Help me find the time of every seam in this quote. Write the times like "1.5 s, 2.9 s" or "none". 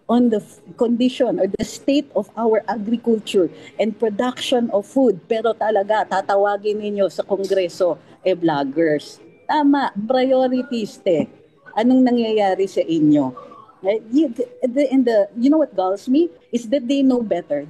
none